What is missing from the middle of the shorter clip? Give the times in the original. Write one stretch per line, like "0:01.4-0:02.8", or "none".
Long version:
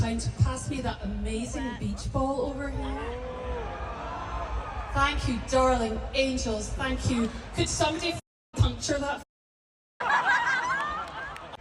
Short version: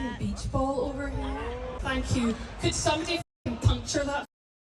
0:03.4-0:06.7